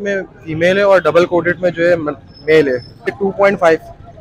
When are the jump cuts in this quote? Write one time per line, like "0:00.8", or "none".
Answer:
0:03.2